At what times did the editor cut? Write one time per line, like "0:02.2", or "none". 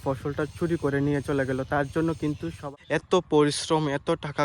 0:02.7